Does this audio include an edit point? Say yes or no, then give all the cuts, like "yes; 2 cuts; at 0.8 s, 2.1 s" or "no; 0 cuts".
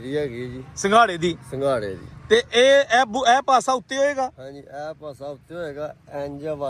no; 0 cuts